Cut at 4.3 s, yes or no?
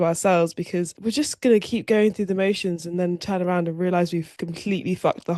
no